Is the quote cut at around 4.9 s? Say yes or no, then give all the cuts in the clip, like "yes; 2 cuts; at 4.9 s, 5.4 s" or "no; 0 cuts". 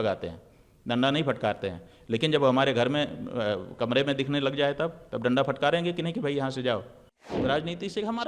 no; 1 cut; at 7.3 s